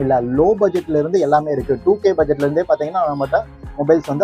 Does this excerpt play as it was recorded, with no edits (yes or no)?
yes